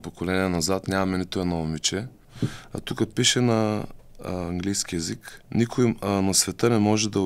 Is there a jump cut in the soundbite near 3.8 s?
no; 2 cuts; at 2.2 s, 5.3 s

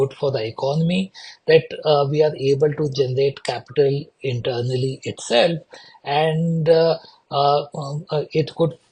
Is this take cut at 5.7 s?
no; 0 cuts

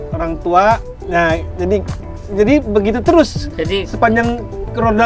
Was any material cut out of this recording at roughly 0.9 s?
yes; 1 cut; at 0.9 s

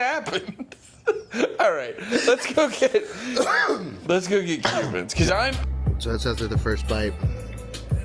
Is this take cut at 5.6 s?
yes; 1 cut; at 5.6 s

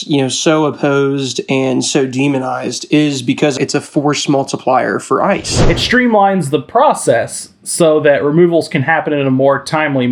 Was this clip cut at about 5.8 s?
yes; 2 cuts; at 3.6 s, 5.8 s

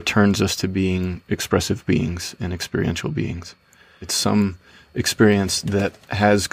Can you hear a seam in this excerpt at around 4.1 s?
yes; 1 cut; at 4.1 s

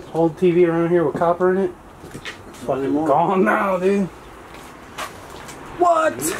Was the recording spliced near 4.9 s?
no; 0 cuts

